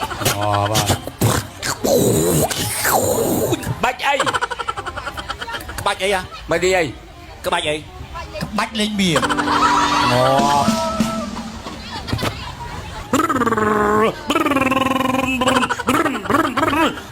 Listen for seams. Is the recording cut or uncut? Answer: cut